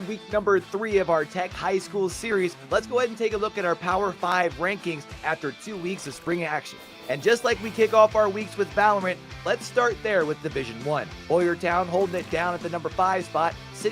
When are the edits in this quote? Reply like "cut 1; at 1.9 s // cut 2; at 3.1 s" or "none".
cut 1; at 1.1 s